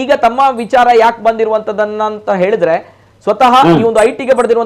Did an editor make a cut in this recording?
no; 0 cuts

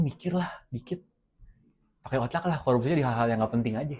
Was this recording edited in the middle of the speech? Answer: no; 0 cuts

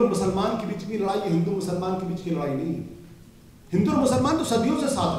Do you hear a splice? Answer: no; 0 cuts

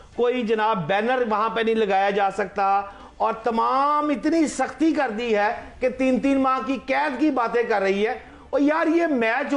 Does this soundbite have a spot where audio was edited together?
no; 0 cuts

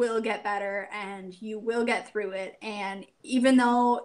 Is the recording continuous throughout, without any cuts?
yes; 0 cuts

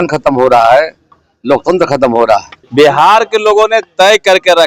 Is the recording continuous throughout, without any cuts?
no; 1 cut; at 2.6 s

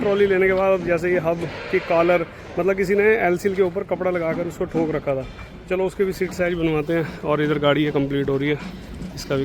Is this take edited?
no; 0 cuts

